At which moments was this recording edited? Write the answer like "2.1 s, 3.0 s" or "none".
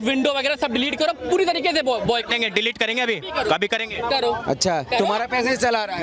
none